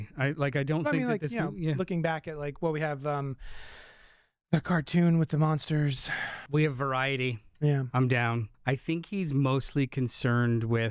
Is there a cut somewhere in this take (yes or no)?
yes